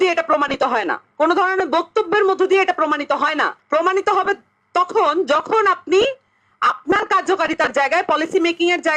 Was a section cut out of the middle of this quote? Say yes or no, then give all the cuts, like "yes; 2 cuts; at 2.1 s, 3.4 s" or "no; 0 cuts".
yes; 2 cuts; at 1.0 s, 3.6 s